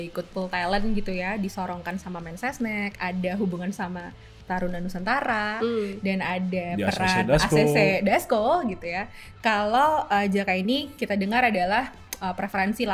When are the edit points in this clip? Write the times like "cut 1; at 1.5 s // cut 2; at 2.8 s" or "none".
none